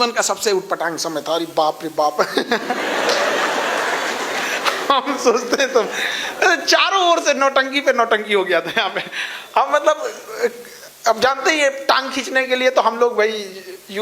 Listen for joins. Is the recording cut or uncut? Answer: uncut